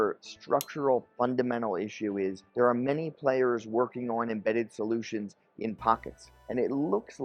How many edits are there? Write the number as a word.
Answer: two